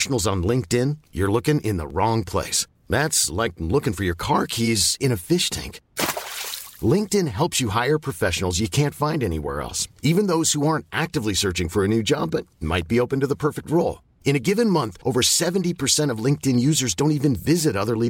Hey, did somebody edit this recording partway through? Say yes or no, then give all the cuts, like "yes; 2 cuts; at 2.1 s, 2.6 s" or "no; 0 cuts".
no; 0 cuts